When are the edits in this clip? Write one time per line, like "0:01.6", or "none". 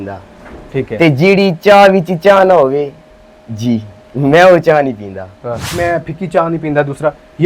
0:05.7